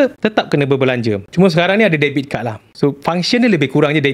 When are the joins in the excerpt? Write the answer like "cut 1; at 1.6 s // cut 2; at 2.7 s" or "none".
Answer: cut 1; at 1.2 s